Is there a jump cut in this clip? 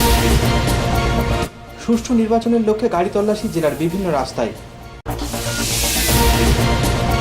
no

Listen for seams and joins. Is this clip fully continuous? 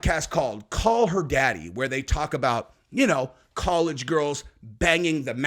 yes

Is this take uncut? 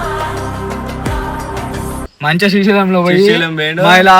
yes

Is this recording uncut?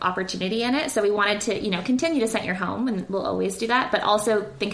yes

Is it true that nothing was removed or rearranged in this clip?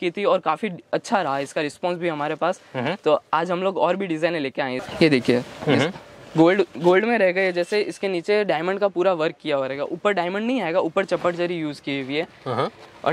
no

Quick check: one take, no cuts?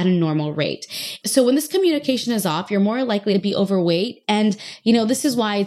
no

